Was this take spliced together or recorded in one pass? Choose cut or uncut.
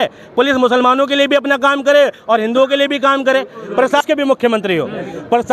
cut